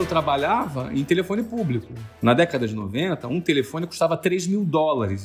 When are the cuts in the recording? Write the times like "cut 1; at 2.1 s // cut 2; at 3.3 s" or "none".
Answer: cut 1; at 2.2 s

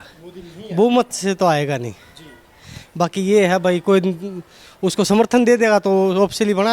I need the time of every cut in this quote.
none

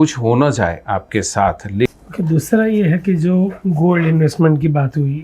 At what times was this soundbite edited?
cut 1; at 1.9 s

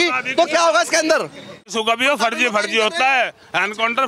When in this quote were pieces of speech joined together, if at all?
cut 1; at 1.7 s

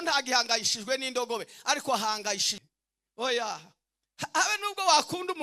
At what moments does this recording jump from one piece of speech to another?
cut 1; at 2.5 s

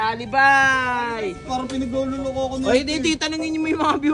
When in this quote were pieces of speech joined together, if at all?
cut 1; at 1.4 s

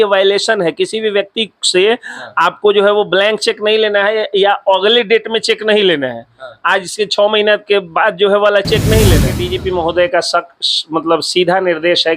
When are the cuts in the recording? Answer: cut 1; at 9.4 s

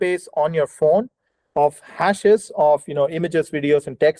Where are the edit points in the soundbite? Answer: none

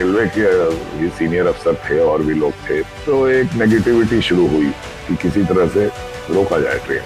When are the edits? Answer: cut 1; at 2.9 s // cut 2; at 6.1 s

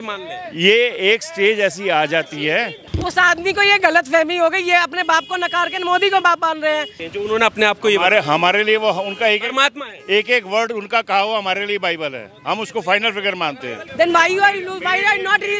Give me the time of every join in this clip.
cut 1; at 2.8 s // cut 2; at 7.0 s // cut 3; at 13.8 s

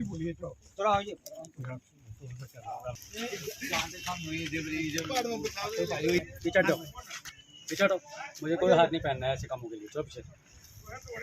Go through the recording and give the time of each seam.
cut 1; at 6.2 s

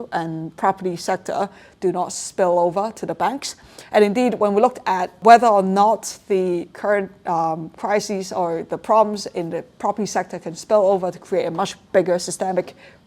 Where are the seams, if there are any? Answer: cut 1; at 5.2 s

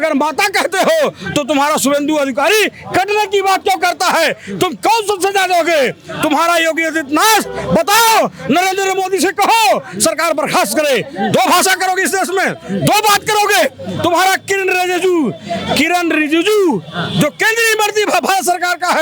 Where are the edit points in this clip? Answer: none

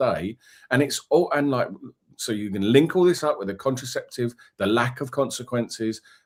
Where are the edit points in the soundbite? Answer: none

